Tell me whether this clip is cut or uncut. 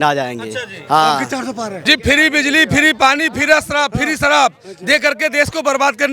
cut